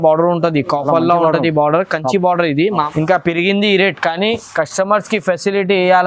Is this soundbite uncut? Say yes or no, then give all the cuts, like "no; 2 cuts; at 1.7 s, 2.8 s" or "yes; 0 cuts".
no; 1 cut; at 2.9 s